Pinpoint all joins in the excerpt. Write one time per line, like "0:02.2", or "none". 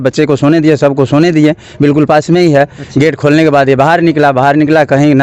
none